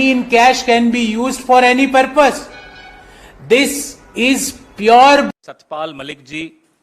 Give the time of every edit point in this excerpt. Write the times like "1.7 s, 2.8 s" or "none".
5.3 s